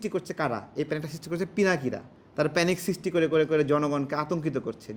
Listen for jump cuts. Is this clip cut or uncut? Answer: uncut